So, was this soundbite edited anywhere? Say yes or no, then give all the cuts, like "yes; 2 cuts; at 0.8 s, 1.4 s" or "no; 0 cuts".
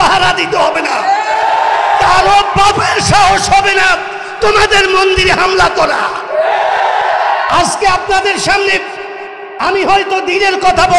yes; 1 cut; at 7.5 s